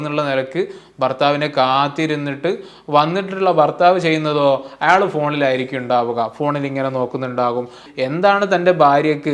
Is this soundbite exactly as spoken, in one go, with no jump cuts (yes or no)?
no